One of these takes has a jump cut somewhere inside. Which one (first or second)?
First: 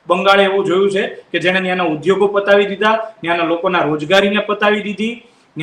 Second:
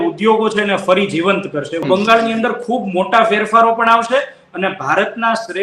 second